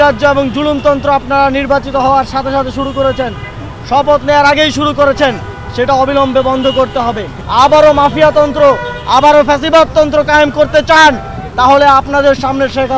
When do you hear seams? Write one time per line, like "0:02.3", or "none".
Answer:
0:07.3